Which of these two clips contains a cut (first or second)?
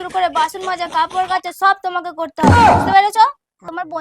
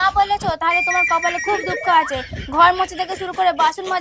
first